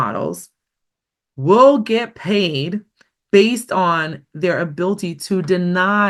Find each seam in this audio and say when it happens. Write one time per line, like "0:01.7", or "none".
none

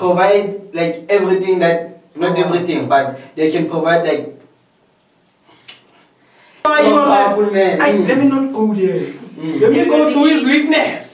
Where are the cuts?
0:06.7

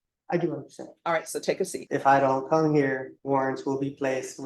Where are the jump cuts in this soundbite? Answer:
0:01.8
0:03.1

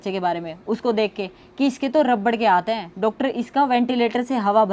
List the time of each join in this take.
none

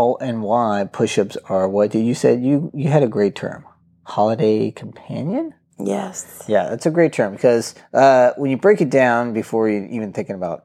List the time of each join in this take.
0:07.8

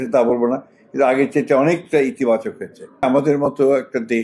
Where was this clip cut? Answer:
0:03.0

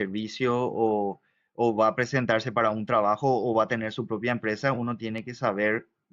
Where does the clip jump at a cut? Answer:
none

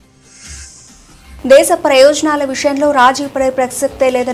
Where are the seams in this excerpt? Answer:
0:01.4

